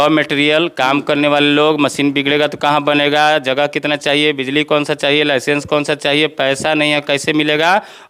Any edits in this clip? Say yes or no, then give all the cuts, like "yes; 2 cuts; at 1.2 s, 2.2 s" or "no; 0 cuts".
no; 0 cuts